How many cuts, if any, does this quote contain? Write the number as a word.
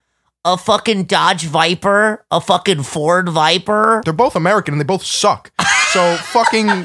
one